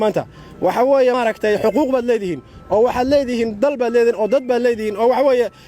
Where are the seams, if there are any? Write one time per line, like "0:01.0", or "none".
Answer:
0:01.1